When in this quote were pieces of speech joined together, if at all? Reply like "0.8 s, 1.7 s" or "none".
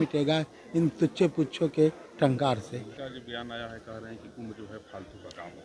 2.9 s